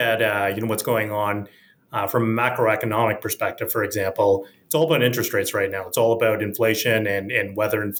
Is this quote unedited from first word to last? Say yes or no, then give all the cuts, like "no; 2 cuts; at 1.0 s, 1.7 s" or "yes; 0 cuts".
yes; 0 cuts